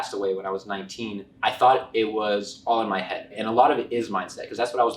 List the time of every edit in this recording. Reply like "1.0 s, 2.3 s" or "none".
1.2 s, 3.3 s